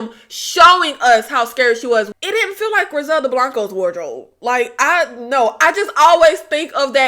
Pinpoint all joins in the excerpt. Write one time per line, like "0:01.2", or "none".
0:02.1